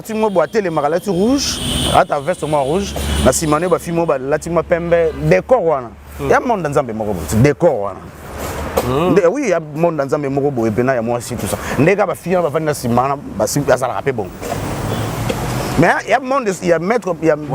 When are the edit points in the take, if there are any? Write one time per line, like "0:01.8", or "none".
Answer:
none

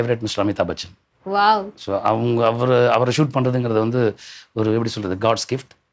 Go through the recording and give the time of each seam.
none

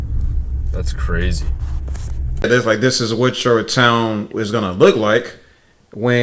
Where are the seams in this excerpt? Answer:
0:02.4

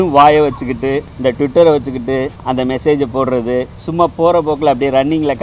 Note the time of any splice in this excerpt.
0:01.1
0:02.4
0:03.8

